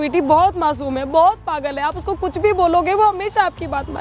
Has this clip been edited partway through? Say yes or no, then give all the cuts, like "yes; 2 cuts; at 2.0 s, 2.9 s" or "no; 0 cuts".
no; 0 cuts